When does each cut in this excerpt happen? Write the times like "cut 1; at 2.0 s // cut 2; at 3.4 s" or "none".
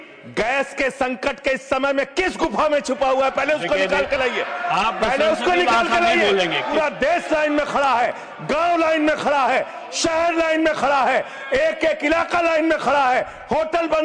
cut 1; at 6.7 s